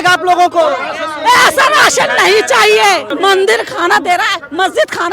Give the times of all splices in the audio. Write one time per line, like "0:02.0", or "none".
0:03.1